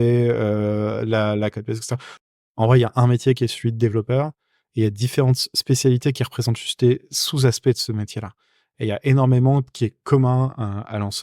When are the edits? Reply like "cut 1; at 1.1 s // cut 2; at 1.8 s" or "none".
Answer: cut 1; at 2.2 s